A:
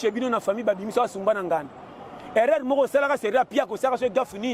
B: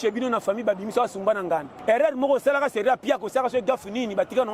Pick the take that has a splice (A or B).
B